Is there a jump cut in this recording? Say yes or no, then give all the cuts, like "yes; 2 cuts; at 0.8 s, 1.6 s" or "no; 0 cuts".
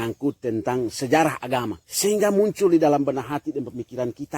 yes; 1 cut; at 1.8 s